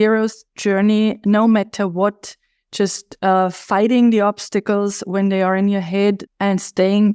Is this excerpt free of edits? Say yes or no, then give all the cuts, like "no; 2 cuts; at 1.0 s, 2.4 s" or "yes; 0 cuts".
no; 1 cut; at 6.2 s